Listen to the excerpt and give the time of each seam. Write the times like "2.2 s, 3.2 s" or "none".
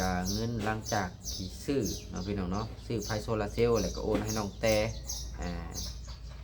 none